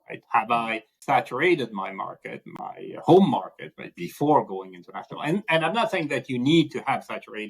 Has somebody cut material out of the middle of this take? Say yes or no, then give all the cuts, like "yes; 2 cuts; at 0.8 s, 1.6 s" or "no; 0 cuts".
yes; 2 cuts; at 0.9 s, 2.4 s